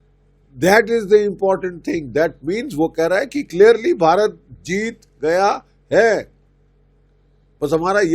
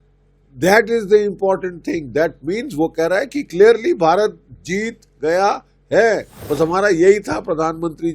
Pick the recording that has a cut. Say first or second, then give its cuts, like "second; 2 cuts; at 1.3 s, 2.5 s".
second; 1 cut; at 6.3 s